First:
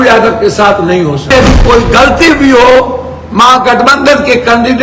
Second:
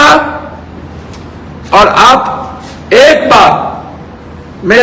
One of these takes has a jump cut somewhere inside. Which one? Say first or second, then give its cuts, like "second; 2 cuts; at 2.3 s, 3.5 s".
first; 1 cut; at 1.3 s